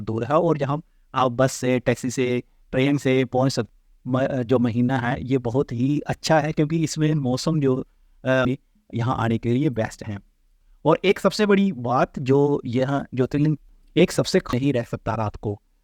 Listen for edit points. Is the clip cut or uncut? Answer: cut